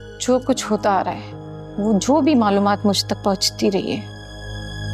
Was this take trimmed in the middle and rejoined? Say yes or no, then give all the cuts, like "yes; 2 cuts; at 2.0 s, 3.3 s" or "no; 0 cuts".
no; 0 cuts